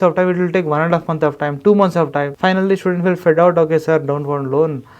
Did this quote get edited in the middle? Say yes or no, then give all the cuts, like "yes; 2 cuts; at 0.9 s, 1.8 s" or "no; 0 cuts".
yes; 1 cut; at 2.3 s